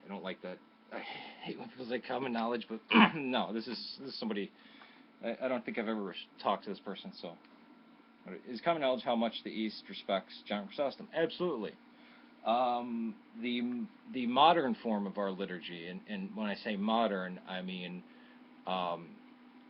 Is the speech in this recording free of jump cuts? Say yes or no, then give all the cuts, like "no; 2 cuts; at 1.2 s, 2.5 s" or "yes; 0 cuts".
no; 1 cut; at 14.4 s